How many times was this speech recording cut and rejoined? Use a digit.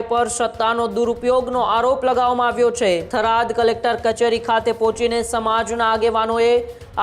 1